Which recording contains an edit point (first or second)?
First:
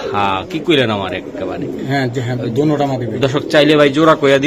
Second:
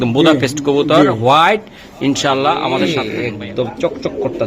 second